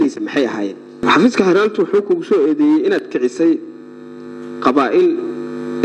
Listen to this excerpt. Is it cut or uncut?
cut